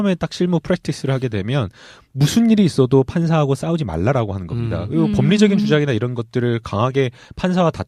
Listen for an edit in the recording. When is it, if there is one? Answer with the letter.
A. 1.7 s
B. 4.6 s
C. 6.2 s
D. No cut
D